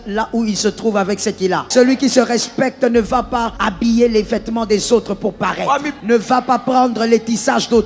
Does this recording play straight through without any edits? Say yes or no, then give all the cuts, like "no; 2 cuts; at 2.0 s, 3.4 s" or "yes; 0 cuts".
no; 3 cuts; at 1.6 s, 3.5 s, 5.9 s